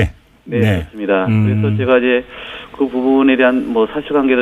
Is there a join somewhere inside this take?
yes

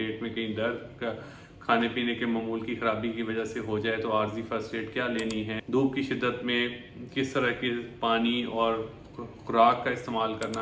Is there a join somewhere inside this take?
yes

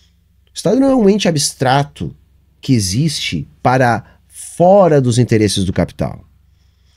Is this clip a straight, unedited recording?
yes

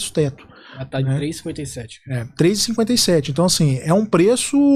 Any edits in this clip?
no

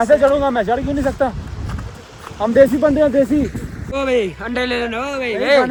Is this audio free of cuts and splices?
yes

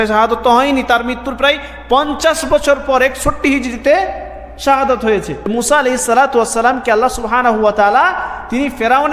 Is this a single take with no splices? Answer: no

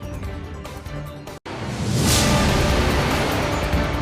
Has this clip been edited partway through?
yes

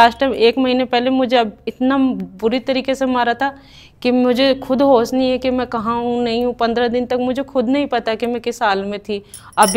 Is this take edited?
no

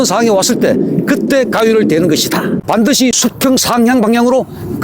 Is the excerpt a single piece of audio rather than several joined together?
no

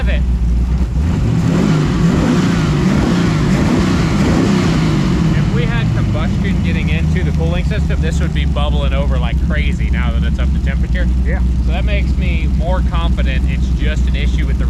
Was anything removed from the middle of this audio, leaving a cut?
no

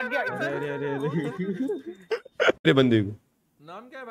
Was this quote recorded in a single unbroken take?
no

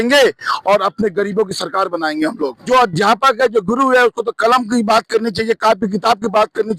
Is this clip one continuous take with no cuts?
no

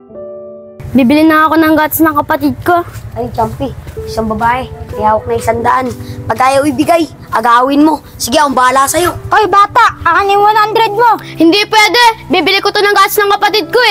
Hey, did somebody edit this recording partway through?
yes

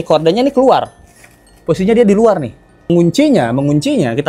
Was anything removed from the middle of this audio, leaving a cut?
yes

